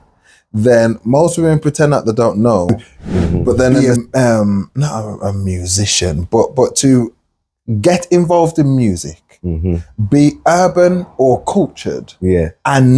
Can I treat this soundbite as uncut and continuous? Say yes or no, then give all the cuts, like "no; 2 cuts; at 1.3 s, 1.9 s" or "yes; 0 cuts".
no; 1 cut; at 3.7 s